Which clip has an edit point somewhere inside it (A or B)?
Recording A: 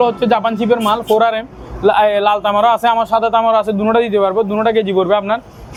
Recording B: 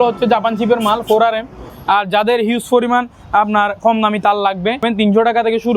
B